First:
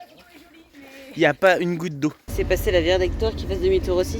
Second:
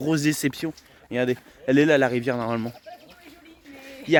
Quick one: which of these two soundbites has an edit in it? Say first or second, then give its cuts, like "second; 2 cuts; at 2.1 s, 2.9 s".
first; 1 cut; at 2.3 s